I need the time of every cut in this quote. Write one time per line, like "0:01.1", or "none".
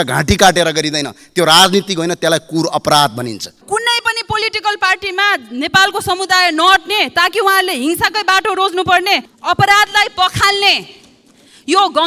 0:03.5
0:09.3